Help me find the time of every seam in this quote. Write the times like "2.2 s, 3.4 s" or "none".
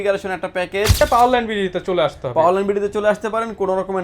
1.0 s